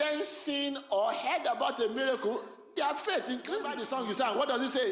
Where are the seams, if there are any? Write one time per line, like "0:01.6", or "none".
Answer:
0:03.8